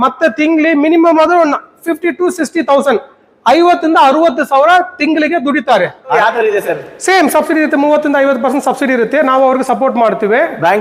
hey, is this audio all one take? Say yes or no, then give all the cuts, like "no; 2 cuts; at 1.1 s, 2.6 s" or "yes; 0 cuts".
no; 1 cut; at 6.1 s